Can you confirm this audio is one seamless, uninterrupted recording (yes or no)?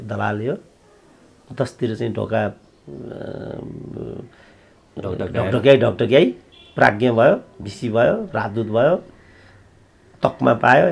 yes